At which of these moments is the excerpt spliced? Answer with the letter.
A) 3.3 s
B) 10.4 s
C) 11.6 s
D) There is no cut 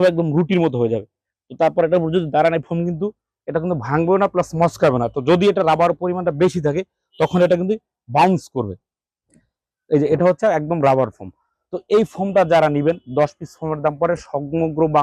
D